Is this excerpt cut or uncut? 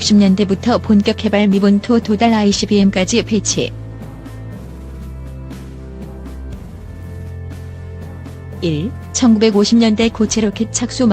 uncut